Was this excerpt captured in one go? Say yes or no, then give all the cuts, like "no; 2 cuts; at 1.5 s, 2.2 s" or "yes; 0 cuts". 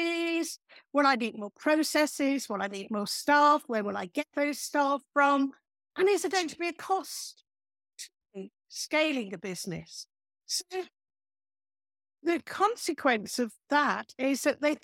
yes; 0 cuts